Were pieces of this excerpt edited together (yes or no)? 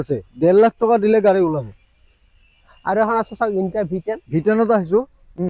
no